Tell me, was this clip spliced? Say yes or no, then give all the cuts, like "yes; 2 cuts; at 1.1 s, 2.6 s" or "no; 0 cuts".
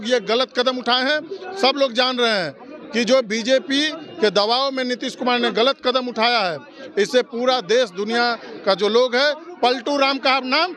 no; 0 cuts